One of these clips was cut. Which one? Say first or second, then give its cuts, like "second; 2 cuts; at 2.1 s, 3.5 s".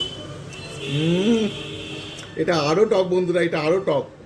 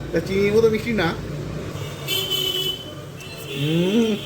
second; 1 cut; at 1.7 s